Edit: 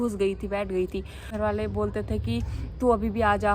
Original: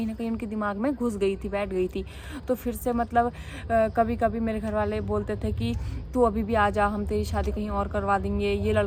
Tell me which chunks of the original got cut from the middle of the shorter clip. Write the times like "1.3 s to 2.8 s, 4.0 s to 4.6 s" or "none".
2.3 s to 4.6 s

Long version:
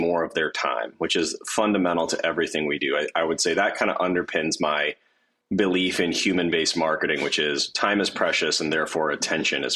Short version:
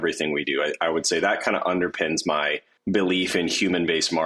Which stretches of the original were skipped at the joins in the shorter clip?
5.0 s to 5.3 s

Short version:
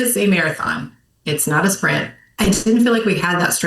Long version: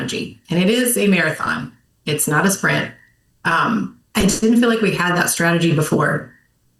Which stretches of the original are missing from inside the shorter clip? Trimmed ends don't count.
3.0 s to 4.0 s

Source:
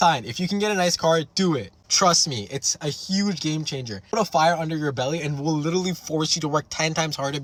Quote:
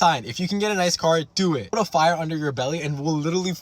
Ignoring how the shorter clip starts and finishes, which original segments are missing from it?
1.7 s to 4.1 s

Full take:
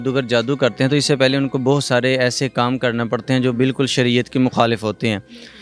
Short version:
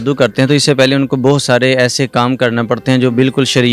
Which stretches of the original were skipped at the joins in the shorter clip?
none

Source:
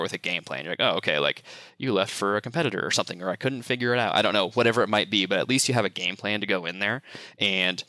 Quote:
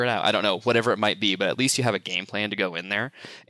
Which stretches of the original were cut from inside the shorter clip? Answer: none

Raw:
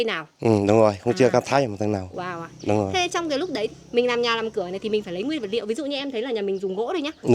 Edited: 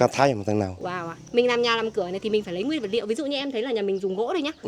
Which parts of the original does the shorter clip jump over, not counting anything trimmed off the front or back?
2.5 s to 3.8 s

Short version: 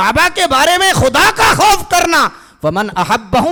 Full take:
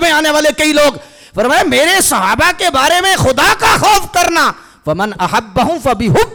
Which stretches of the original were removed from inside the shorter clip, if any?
none

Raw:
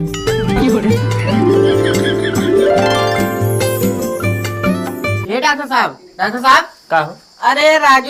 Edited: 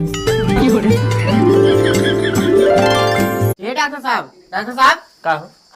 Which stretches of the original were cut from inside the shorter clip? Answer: 3.5 s to 5.2 s

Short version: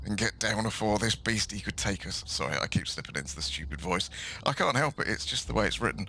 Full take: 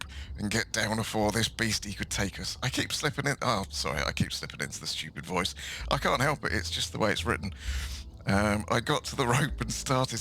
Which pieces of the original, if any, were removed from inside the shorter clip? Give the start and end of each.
2.6 s to 3.7 s

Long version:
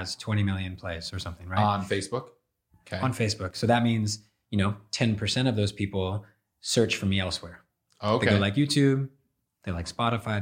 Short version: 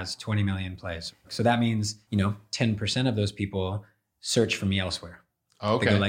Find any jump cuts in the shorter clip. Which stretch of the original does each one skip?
1.2 s to 3.5 s, 4.2 s to 4.4 s

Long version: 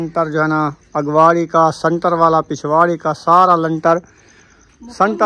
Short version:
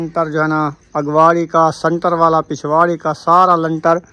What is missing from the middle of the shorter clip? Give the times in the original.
none

